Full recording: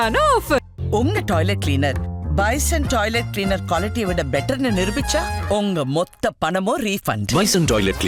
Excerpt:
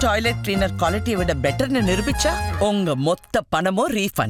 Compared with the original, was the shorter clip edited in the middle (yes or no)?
no